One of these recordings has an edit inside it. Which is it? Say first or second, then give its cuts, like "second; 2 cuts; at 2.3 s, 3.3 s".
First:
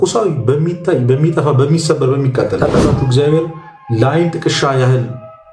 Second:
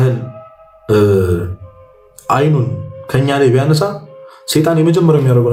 first; 1 cut; at 2.6 s